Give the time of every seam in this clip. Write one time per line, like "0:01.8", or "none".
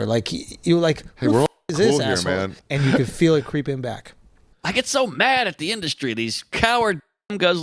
0:02.6
0:04.5